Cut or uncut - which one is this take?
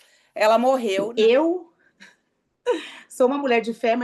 cut